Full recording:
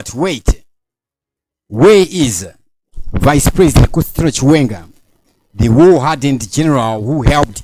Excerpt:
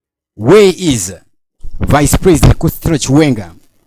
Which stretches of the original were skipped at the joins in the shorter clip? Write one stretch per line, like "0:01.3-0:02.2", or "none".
none